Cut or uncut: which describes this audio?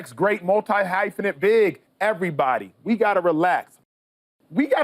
cut